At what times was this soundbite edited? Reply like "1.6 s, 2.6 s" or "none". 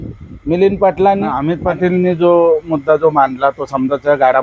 1.6 s